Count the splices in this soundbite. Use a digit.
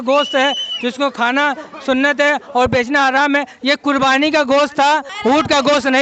1